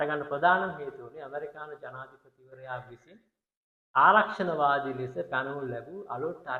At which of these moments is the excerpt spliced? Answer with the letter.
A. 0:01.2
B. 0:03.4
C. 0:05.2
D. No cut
D